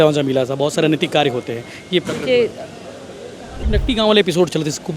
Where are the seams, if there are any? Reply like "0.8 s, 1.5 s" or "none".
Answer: 3.7 s